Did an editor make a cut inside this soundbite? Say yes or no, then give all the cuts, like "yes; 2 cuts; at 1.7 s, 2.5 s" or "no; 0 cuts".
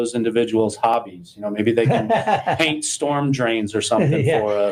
no; 0 cuts